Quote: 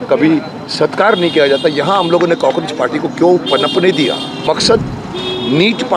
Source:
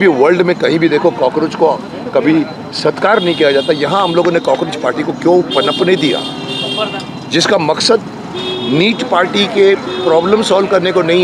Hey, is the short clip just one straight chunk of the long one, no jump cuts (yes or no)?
no